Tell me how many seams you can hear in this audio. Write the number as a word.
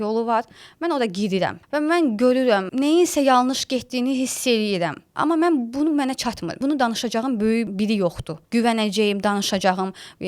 five